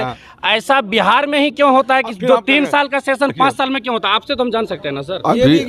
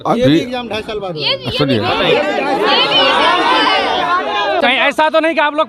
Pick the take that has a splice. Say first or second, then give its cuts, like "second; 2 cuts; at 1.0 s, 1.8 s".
second; 1 cut; at 4.6 s